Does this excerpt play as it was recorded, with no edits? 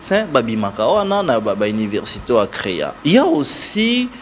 no; 1 cut; at 2.9 s

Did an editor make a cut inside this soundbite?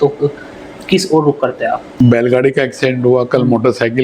yes; 1 cut; at 1.9 s

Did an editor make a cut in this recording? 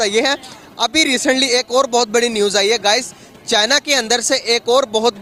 no; 0 cuts

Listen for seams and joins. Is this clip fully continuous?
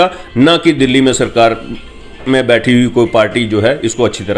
yes; 0 cuts

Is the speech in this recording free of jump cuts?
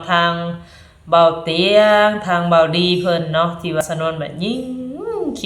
no; 1 cut; at 3.8 s

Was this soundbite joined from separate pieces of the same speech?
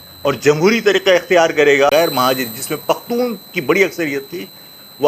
yes; 1 cut; at 1.9 s

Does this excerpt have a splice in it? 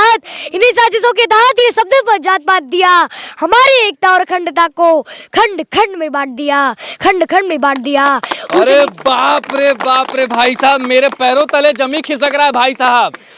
no; 0 cuts

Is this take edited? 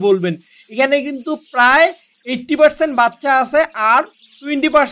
no; 0 cuts

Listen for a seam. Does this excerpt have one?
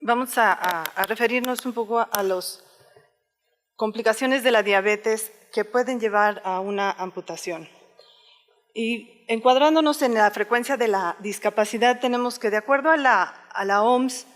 yes; 1 cut; at 13.2 s

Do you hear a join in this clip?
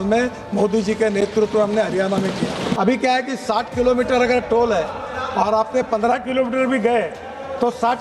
yes; 1 cut; at 2.7 s

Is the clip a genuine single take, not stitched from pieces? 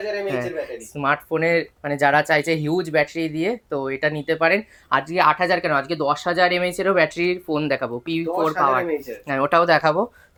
yes; 0 cuts

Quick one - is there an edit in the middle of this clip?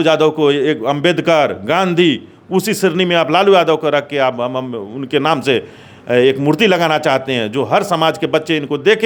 no; 0 cuts

